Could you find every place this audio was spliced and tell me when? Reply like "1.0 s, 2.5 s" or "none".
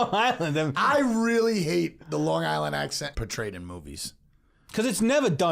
3.1 s